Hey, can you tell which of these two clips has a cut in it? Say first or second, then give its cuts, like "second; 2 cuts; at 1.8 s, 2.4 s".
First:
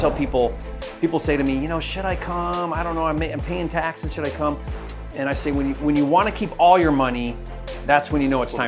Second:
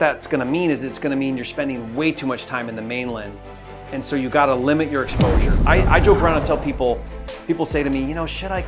second; 1 cut; at 5.5 s